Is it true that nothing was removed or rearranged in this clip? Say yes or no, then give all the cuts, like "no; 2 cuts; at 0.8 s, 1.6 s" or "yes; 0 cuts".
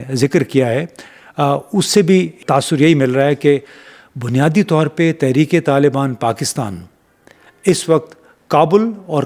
no; 1 cut; at 2.4 s